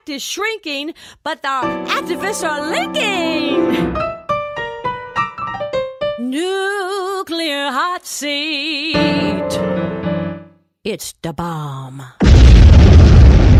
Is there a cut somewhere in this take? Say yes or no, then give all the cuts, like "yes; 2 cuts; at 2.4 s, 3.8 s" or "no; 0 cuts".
no; 0 cuts